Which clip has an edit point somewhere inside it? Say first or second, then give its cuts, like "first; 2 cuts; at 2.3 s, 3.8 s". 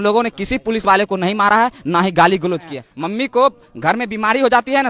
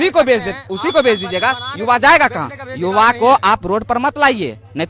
first; 1 cut; at 2.8 s